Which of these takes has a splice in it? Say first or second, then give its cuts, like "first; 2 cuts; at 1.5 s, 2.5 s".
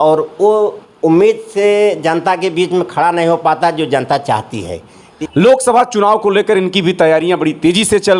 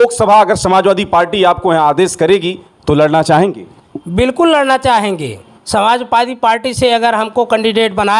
first; 1 cut; at 5.1 s